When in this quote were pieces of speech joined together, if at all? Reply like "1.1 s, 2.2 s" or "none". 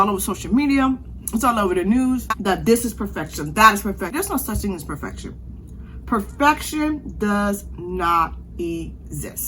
2.3 s, 4.1 s

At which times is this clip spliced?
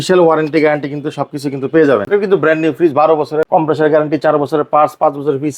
2.0 s, 3.5 s

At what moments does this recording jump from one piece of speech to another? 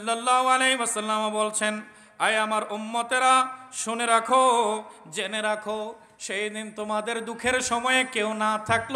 none

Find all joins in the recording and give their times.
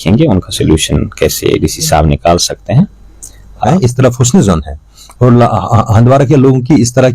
3.7 s

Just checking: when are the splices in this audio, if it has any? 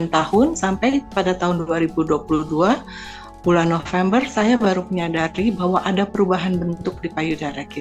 none

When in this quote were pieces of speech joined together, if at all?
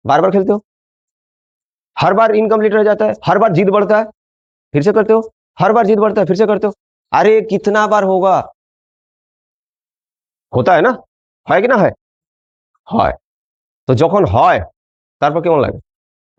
none

